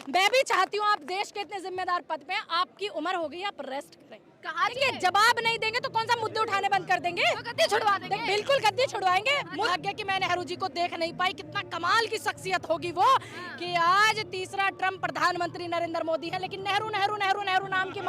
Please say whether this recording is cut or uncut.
cut